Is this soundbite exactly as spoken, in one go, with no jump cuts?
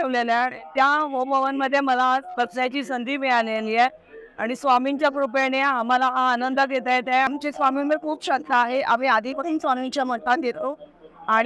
no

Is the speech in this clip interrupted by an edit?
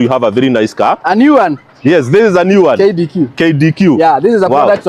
no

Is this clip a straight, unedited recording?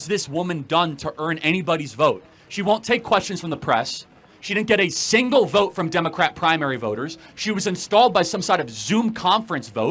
yes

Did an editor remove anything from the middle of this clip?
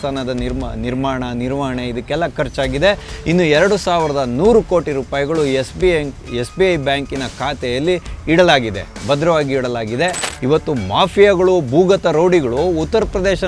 yes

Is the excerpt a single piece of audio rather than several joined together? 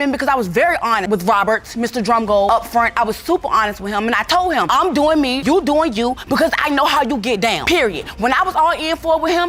yes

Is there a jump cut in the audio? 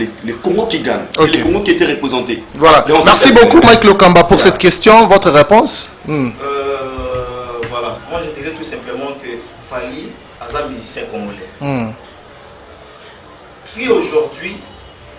no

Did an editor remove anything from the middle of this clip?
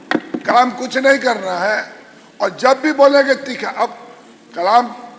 no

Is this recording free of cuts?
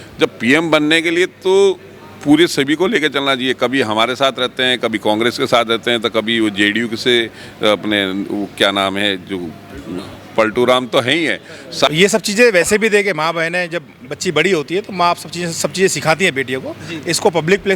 no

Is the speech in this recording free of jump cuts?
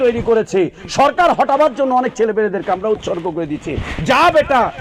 yes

